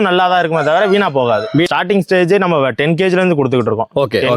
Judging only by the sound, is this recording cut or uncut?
cut